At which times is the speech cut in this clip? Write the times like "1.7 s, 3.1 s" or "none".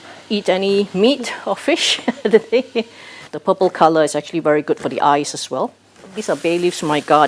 3.3 s, 6.2 s

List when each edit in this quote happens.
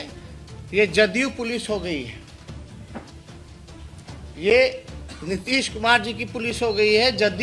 none

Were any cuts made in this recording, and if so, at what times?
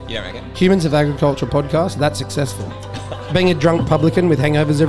none

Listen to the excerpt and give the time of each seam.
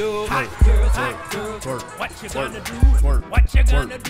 none

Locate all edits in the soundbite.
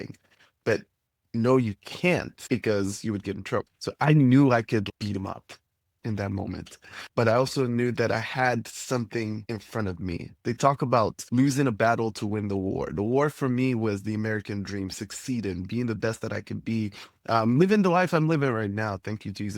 2.3 s, 3.8 s, 9.5 s, 11.2 s

